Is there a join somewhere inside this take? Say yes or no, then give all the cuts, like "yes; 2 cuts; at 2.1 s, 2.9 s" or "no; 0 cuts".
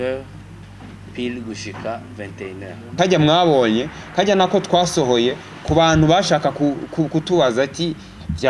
yes; 1 cut; at 2.9 s